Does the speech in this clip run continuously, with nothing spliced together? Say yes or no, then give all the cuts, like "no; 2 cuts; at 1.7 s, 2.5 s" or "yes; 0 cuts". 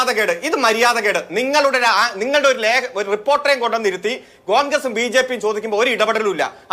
yes; 0 cuts